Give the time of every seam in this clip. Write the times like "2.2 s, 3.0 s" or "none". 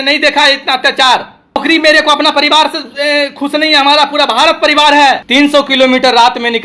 1.6 s, 5.2 s